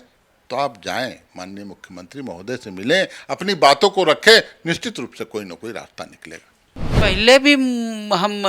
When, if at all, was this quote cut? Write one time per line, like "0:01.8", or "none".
0:06.9